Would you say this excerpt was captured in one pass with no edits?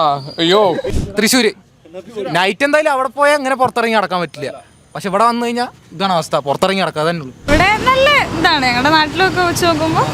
no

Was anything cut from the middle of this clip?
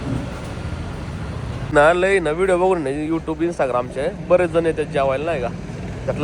yes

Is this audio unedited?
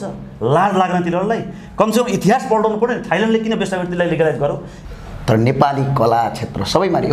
no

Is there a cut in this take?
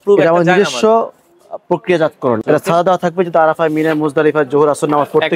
yes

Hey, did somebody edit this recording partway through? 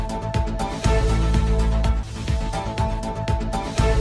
yes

